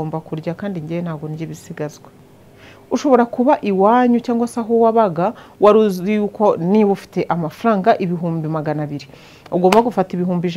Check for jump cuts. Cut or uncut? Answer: cut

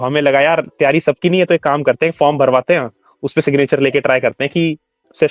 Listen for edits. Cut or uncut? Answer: uncut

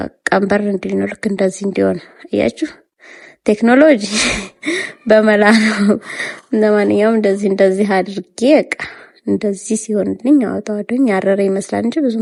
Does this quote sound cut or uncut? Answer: uncut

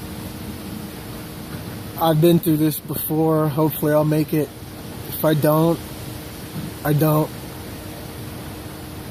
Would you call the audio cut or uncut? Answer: uncut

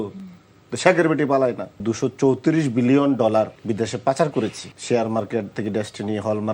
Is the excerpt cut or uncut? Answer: cut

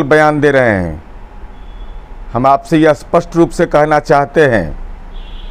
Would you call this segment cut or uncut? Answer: uncut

